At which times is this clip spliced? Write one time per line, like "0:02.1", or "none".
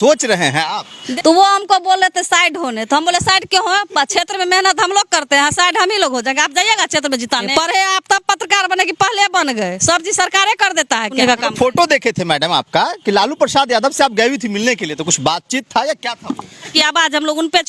0:01.0
0:07.5
0:11.1
0:16.7